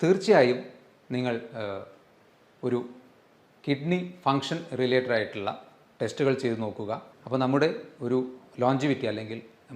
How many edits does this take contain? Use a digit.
1